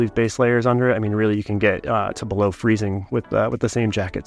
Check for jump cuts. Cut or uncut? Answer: uncut